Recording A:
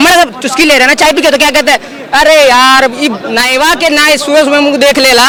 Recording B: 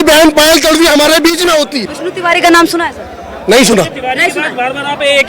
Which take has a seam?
B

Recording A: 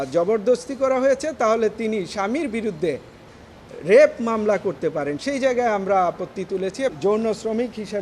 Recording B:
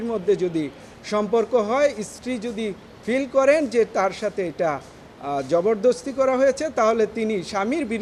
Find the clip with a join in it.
A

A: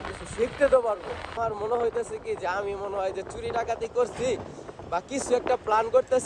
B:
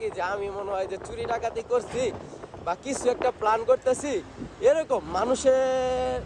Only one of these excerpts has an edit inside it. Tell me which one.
A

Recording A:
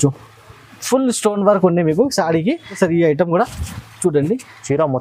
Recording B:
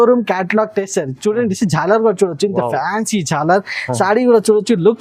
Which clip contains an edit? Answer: A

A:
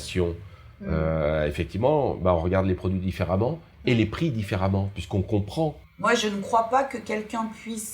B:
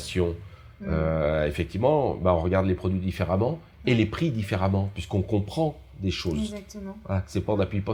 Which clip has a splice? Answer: A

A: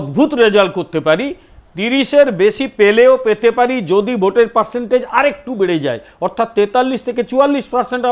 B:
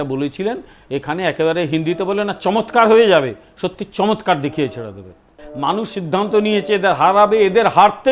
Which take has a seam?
B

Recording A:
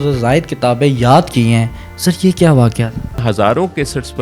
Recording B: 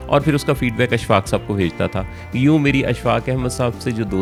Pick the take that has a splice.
A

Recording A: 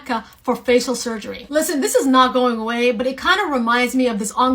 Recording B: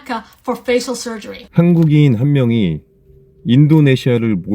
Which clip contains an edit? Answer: B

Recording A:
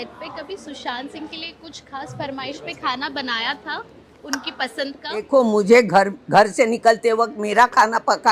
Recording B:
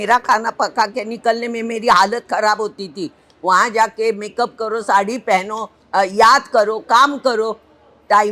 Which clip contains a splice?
A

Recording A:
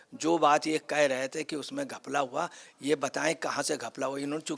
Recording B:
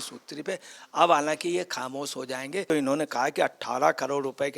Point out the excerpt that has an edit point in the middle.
B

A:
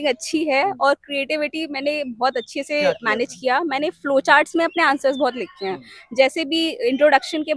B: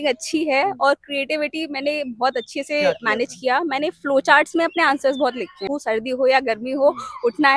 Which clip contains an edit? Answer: B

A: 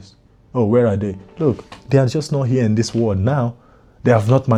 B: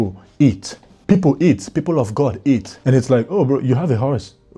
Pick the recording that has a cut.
B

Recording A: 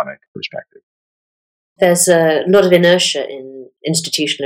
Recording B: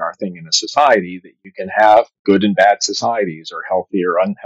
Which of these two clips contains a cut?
A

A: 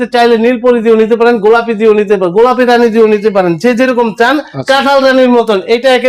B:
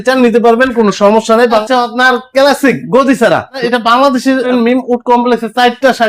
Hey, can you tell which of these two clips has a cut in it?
B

